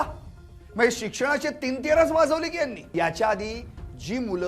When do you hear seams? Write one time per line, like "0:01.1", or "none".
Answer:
0:02.9